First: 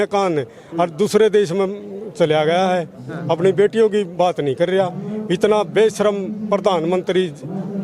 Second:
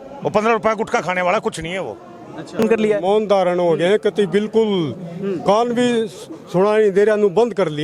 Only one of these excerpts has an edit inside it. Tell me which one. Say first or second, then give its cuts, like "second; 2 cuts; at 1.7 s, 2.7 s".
second; 1 cut; at 2.6 s